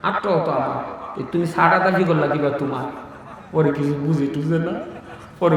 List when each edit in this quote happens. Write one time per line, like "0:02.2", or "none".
none